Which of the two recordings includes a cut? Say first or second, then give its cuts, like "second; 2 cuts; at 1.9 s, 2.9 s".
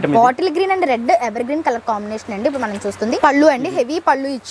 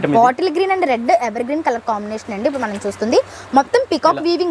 first; 1 cut; at 3.1 s